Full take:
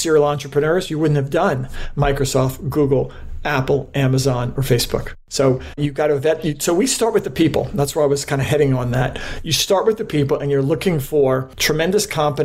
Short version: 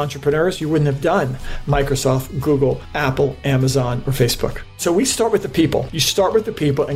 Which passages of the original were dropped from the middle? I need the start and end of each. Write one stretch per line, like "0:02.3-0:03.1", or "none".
0:03.2-0:03.4
0:05.2-0:06.5
0:07.7-0:09.4